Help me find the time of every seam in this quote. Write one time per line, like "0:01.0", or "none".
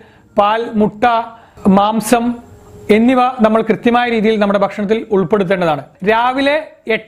0:05.9